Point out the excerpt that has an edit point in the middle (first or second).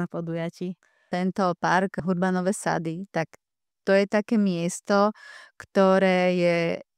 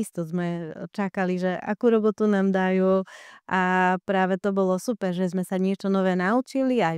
first